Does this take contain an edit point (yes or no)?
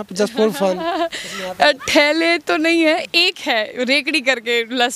no